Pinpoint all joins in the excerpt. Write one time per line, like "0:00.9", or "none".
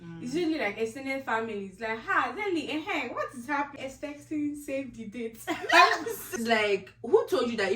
0:03.8
0:06.3